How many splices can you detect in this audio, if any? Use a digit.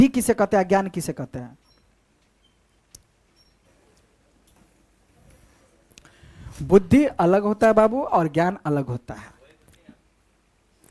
1